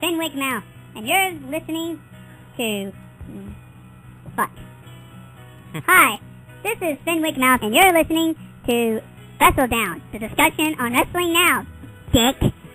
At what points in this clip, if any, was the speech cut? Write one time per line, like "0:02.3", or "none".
none